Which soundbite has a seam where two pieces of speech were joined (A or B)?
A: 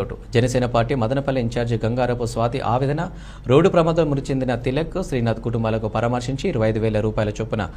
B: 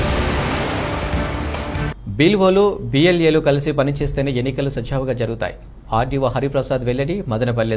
B